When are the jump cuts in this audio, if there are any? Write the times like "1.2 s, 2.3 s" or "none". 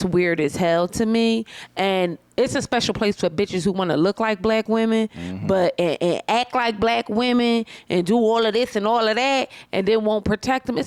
none